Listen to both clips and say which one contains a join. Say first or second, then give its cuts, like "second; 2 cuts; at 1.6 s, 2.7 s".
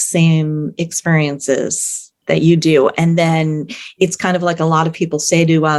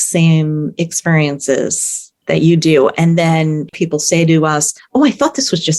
second; 2 cuts; at 3.7 s, 4.8 s